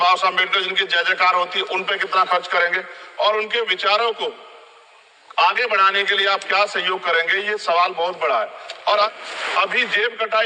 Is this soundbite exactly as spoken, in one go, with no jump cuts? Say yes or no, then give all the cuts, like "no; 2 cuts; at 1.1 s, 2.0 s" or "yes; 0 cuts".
no; 1 cut; at 9.1 s